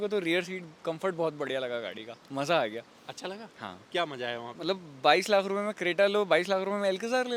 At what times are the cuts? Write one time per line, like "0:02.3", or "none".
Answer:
none